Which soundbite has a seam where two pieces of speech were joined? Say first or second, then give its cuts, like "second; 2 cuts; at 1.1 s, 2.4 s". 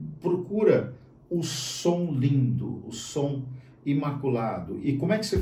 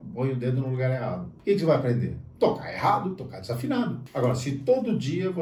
second; 2 cuts; at 1.3 s, 4.0 s